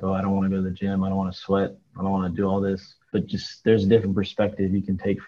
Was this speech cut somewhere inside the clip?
no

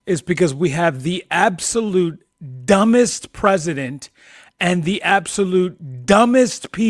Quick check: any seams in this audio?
no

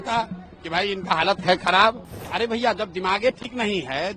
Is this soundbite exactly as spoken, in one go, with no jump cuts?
no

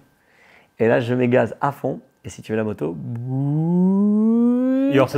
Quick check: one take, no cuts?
yes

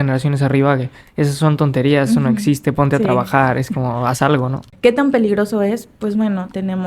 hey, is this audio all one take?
no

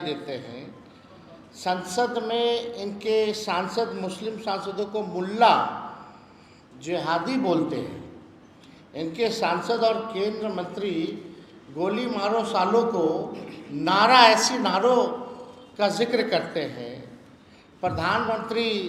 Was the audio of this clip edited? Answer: no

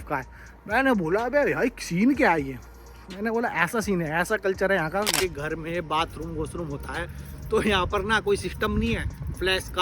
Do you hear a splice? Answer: yes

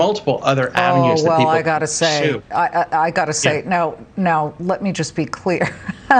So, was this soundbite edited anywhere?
no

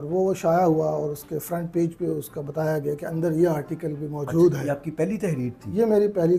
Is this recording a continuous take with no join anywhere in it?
yes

